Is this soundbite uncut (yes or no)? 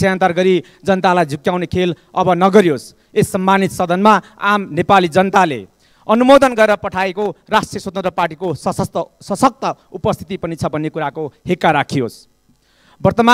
yes